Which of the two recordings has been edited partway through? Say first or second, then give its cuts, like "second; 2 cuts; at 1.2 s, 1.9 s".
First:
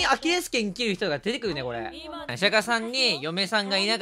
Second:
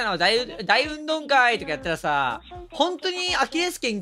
first; 1 cut; at 2.3 s